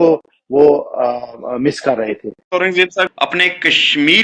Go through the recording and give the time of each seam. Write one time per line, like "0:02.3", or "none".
0:03.1